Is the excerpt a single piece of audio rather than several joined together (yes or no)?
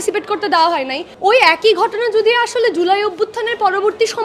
no